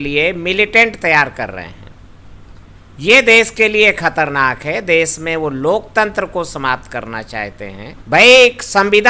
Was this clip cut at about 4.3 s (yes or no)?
no